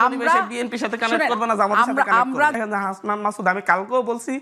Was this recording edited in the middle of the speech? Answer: yes; 1 cut; at 2.5 s

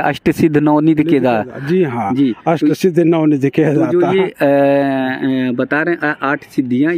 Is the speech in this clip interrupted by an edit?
no; 0 cuts

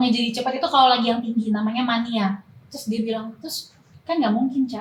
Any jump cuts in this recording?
yes; 1 cut; at 2.6 s

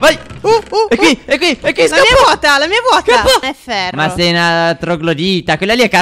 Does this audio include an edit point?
yes; 1 cut; at 3.5 s

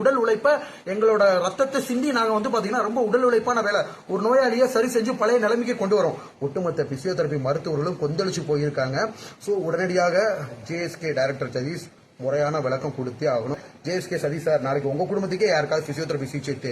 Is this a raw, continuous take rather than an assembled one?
no; 2 cuts; at 6.3 s, 13.6 s

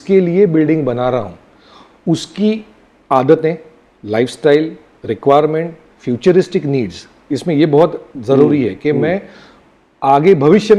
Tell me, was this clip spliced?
no; 0 cuts

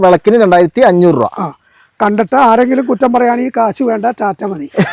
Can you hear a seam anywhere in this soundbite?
no; 0 cuts

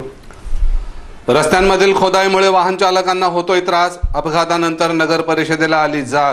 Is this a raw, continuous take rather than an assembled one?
yes; 0 cuts

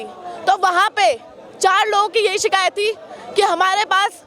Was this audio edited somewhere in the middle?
no; 0 cuts

